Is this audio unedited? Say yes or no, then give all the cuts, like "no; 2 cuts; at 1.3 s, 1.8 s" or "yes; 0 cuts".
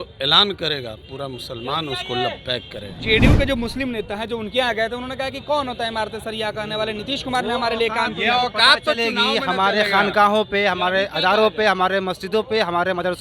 yes; 0 cuts